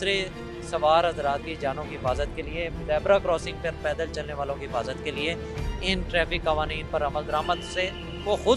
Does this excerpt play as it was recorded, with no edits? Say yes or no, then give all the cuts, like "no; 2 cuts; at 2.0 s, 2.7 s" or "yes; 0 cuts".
yes; 0 cuts